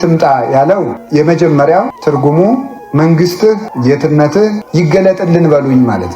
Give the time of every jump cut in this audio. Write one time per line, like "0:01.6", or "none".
0:01.0
0:01.9
0:02.8
0:03.7
0:04.6